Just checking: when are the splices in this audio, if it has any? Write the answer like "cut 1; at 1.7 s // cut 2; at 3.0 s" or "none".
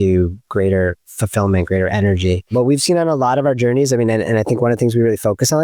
cut 1; at 2.5 s